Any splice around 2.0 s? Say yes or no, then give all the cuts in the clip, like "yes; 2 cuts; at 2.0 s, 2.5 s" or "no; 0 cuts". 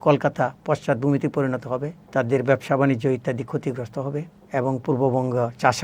yes; 2 cuts; at 2.0 s, 4.4 s